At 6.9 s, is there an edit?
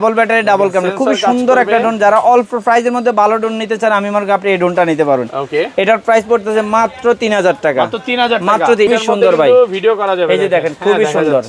no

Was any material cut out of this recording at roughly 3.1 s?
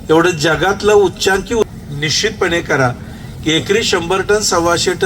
no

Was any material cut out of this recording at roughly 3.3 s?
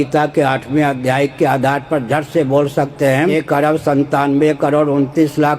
yes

